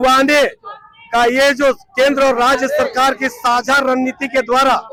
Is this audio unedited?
yes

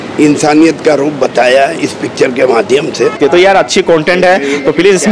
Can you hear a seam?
yes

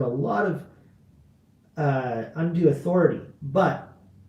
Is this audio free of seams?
no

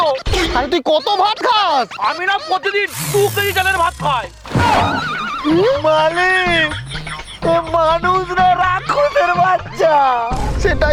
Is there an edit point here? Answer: no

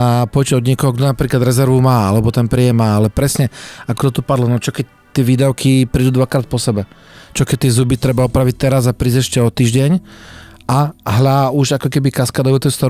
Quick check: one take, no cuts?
yes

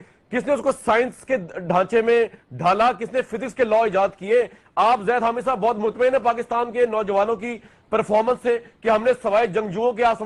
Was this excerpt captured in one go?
yes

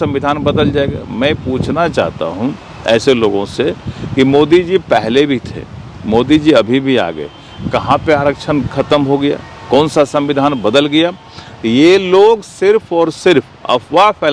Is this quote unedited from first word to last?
yes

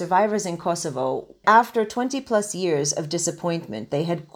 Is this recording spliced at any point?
yes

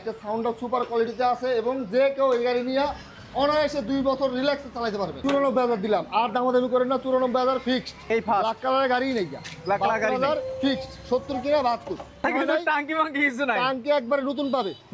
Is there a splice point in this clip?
yes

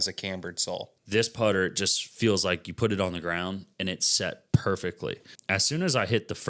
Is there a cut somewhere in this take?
yes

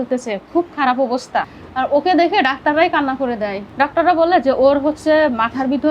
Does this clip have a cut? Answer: yes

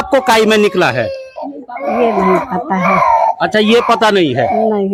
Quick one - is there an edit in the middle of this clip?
no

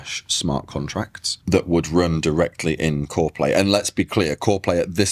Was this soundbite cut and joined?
no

